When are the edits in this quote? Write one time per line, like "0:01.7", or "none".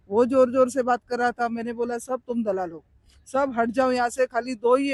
none